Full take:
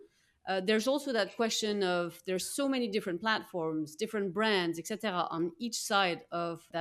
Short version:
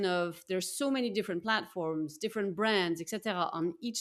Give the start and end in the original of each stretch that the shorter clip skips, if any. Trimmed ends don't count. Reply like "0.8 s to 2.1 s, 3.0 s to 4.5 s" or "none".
none